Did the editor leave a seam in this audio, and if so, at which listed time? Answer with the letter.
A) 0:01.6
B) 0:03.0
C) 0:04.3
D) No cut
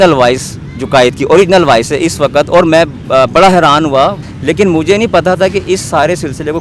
C